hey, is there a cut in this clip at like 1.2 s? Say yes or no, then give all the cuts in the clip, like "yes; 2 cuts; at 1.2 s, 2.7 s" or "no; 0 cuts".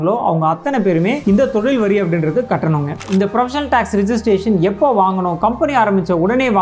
yes; 2 cuts; at 1.2 s, 3.0 s